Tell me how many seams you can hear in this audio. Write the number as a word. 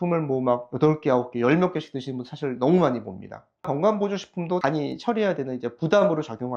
zero